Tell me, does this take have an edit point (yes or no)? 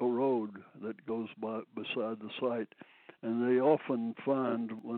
no